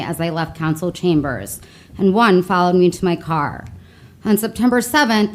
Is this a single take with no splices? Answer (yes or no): yes